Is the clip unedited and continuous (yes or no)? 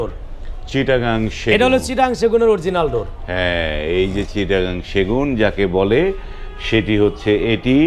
yes